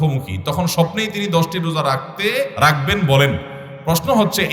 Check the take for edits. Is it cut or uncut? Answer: cut